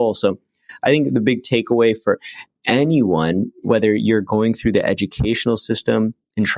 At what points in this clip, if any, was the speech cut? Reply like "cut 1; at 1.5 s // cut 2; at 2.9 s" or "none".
cut 1; at 3.6 s